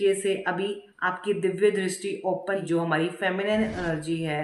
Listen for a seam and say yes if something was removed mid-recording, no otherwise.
yes